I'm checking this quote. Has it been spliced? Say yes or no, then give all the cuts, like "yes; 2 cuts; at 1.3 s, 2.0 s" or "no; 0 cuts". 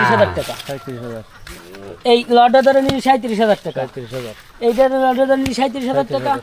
no; 0 cuts